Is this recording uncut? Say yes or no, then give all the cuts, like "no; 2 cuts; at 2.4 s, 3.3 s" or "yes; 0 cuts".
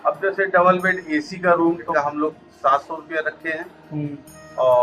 no; 1 cut; at 1.9 s